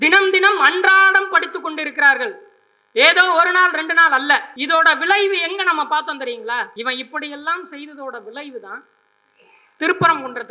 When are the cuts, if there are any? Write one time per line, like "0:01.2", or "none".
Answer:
0:04.5
0:06.7